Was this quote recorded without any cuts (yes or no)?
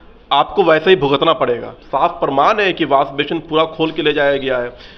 no